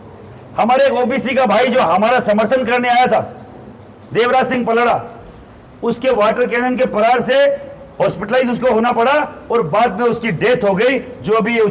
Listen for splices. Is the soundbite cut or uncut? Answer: uncut